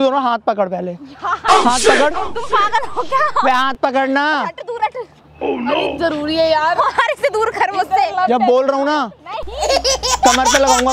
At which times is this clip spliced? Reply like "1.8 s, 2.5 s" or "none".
none

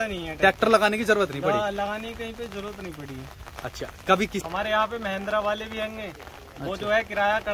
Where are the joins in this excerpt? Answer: 4.4 s

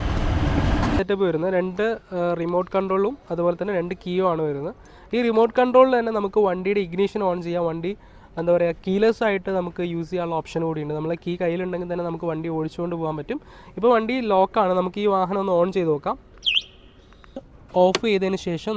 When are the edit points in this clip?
1.0 s, 17.5 s

